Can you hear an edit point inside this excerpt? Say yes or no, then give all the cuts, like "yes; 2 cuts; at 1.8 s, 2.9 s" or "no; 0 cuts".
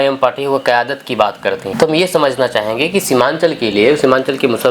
yes; 1 cut; at 1.7 s